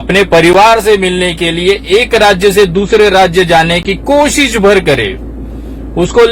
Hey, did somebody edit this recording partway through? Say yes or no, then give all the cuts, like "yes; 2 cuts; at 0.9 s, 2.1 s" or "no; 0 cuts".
no; 0 cuts